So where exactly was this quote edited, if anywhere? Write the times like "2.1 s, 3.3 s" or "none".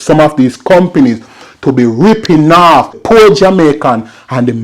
3.0 s